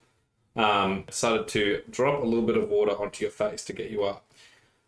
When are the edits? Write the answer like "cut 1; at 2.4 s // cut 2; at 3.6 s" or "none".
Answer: cut 1; at 1.1 s